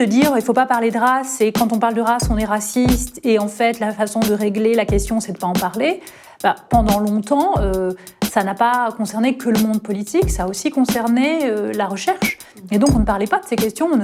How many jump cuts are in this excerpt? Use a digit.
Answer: 0